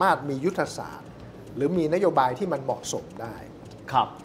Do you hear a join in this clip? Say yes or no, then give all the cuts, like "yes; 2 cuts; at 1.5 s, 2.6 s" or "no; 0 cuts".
no; 0 cuts